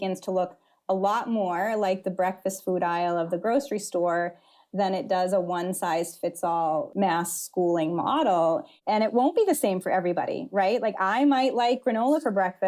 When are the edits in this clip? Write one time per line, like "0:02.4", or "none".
0:06.9
0:08.7